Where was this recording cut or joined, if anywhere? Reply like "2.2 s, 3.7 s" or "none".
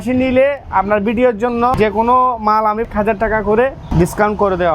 1.7 s, 2.9 s, 3.8 s